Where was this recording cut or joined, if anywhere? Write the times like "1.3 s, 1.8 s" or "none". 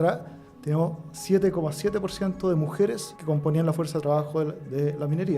3.1 s